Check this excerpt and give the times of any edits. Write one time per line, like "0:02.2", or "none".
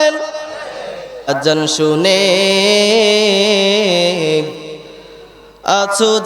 0:01.3